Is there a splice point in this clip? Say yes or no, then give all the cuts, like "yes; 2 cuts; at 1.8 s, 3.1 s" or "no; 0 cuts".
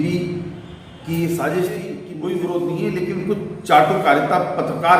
yes; 1 cut; at 2.0 s